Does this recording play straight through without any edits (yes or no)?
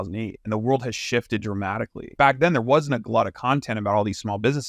no